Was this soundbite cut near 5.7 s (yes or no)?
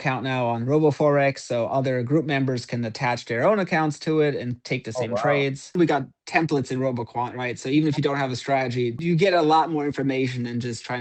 yes